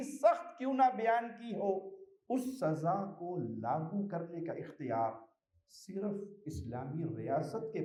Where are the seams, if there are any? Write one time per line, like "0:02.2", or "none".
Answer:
none